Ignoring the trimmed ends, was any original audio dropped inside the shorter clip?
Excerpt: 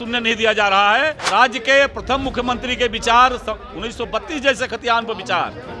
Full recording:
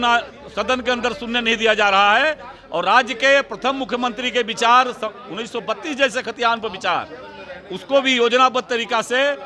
yes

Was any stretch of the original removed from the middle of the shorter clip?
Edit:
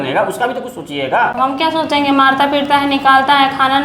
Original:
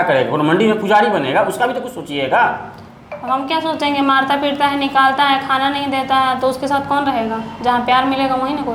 yes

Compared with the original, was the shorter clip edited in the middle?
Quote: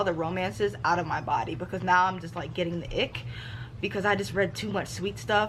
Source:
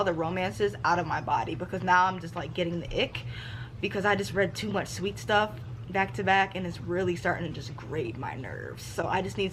no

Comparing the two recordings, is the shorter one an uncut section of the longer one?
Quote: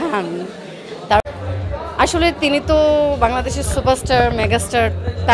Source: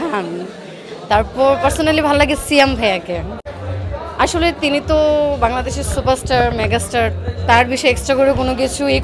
no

